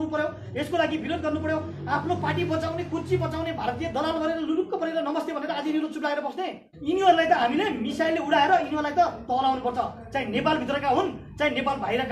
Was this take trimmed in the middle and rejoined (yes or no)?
yes